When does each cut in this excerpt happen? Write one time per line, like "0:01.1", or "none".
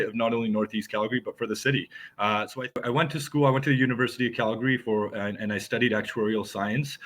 0:02.7